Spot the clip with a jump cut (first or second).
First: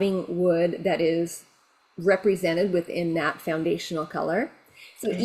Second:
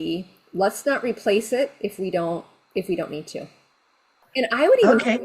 second